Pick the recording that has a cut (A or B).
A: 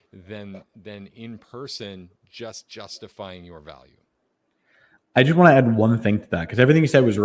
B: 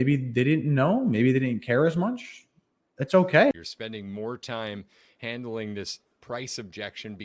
B